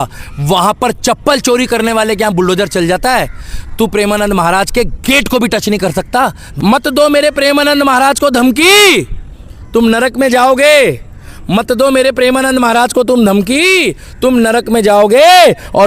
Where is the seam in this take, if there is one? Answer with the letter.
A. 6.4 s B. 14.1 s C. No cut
A